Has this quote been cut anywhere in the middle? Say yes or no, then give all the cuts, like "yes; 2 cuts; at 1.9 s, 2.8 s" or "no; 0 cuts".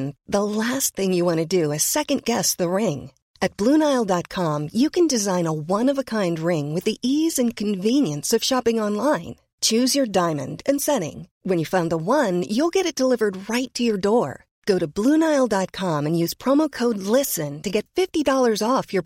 no; 0 cuts